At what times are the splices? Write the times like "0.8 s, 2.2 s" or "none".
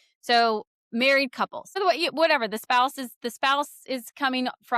1.8 s